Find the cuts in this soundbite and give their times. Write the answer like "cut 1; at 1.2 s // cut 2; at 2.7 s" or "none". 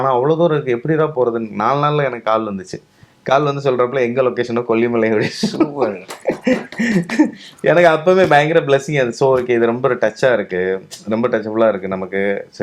none